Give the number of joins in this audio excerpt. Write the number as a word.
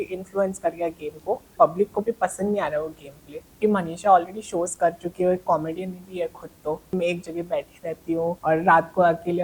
four